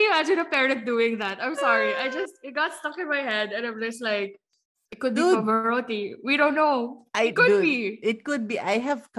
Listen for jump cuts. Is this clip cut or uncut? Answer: uncut